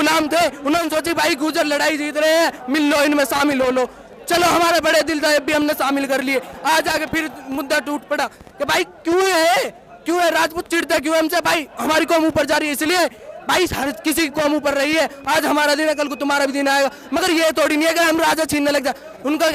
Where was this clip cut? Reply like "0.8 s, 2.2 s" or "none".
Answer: none